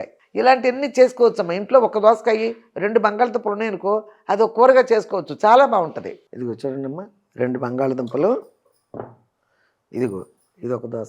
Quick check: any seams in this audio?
yes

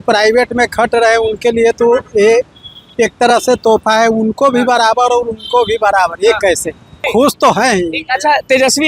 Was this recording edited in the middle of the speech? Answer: yes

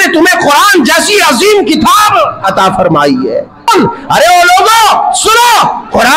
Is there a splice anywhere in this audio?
yes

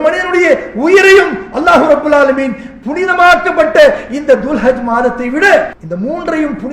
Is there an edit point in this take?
yes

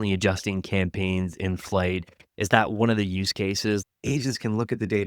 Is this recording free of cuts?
no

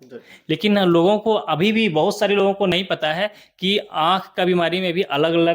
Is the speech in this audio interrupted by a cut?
yes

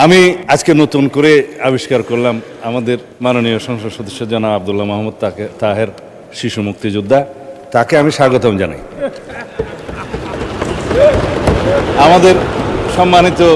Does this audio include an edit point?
no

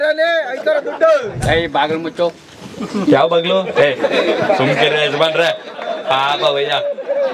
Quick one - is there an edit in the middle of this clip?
yes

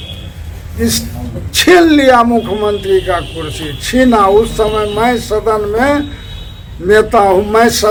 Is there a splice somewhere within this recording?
no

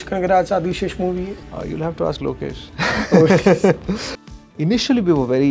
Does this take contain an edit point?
yes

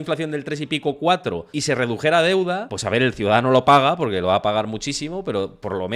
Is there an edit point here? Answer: yes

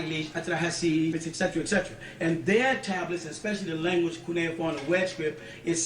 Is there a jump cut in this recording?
yes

